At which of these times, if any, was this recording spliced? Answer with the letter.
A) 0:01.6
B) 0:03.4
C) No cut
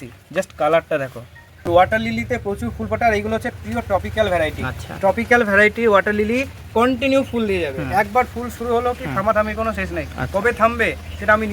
A